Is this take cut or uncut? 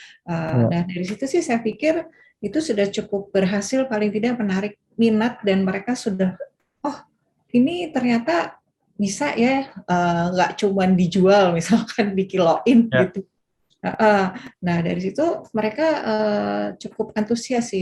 uncut